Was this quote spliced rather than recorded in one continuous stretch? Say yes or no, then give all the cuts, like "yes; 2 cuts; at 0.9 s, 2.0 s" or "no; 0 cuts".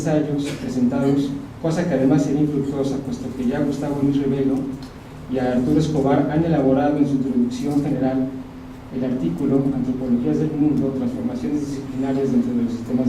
yes; 1 cut; at 5.1 s